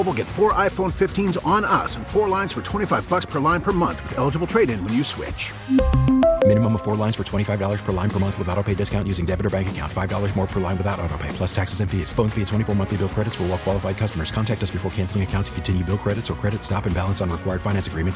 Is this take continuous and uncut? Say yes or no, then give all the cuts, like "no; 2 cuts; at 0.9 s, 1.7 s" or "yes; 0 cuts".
yes; 0 cuts